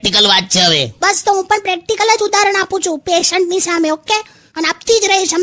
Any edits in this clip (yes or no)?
no